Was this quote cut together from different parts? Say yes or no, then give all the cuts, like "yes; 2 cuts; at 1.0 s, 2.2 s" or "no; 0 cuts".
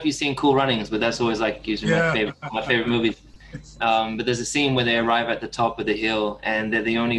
no; 0 cuts